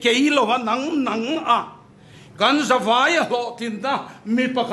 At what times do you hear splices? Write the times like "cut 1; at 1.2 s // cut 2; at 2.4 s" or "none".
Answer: none